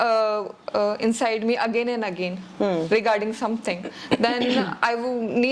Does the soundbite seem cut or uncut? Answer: uncut